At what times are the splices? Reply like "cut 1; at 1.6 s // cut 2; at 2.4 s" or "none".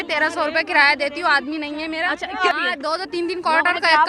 cut 1; at 2.4 s